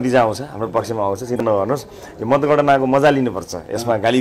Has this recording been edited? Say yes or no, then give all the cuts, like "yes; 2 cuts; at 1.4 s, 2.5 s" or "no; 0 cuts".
yes; 1 cut; at 1.4 s